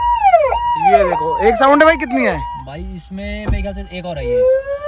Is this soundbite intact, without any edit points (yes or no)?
yes